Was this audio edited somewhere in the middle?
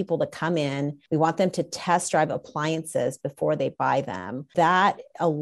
yes; 2 cuts; at 1.0 s, 4.5 s

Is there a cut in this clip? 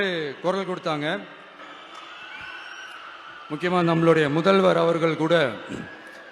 no; 0 cuts

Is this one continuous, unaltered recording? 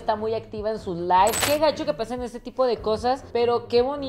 no; 1 cut; at 1.4 s

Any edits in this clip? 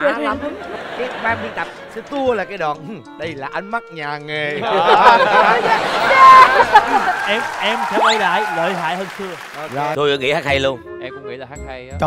yes; 1 cut; at 9.9 s

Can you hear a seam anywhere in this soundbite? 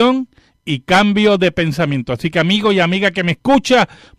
no; 0 cuts

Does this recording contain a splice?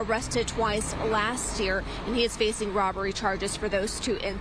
no; 0 cuts

